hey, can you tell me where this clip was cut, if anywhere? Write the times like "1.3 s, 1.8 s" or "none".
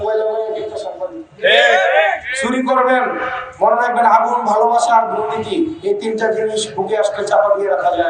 none